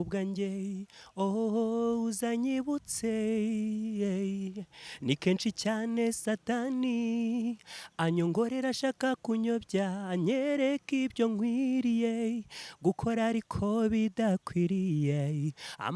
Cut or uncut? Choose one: uncut